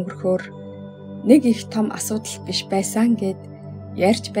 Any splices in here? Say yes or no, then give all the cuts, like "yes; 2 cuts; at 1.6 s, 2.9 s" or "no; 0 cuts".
no; 0 cuts